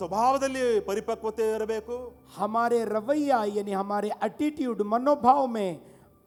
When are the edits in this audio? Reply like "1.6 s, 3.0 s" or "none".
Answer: none